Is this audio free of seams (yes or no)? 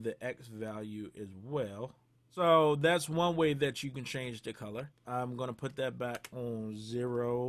no